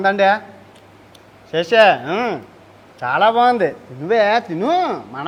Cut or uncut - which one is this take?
uncut